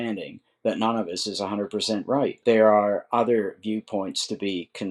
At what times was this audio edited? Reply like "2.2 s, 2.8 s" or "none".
2.4 s